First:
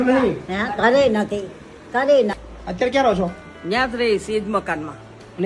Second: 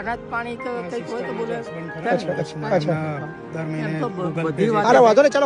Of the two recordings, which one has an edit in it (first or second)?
first